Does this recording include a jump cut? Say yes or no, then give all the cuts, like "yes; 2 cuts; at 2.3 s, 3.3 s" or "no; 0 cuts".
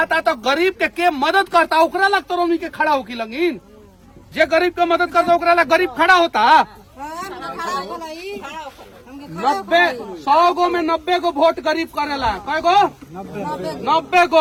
no; 0 cuts